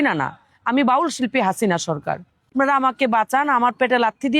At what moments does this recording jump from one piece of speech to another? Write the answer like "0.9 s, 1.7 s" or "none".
2.5 s